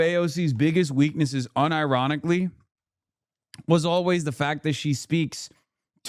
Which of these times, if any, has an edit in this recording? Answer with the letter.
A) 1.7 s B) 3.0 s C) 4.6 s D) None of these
D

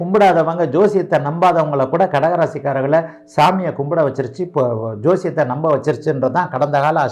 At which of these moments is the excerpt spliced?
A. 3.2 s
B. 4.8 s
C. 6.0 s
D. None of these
D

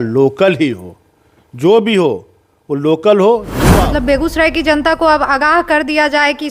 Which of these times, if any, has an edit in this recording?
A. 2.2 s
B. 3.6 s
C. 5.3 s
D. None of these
B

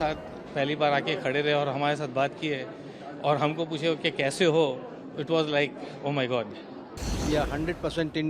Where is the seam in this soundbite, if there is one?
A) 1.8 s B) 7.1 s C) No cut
B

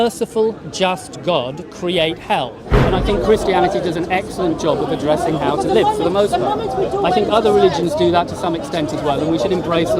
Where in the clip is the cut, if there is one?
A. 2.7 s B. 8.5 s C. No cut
A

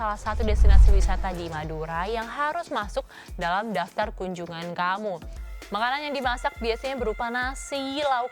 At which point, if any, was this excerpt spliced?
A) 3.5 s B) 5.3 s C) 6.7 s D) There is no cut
B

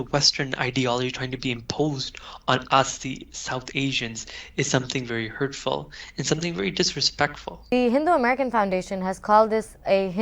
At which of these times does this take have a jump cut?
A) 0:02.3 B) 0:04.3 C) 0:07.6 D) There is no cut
C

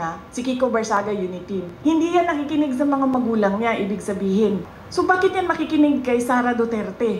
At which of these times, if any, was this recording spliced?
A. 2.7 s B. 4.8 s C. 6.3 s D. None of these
B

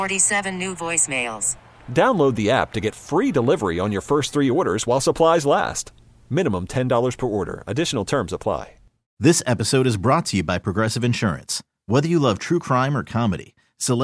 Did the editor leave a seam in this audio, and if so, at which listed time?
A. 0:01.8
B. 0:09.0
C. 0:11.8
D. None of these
B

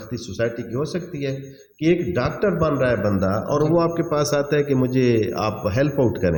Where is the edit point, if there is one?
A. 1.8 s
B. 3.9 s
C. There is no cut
C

